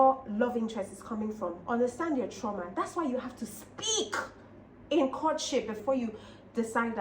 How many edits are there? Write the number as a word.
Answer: one